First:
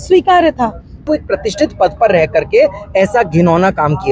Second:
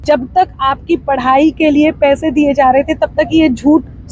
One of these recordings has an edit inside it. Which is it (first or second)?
first